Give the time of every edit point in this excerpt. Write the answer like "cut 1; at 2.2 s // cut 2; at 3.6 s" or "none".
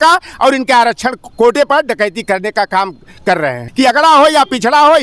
cut 1; at 3.6 s